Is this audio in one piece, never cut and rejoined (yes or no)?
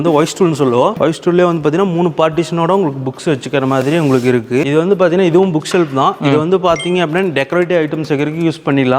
no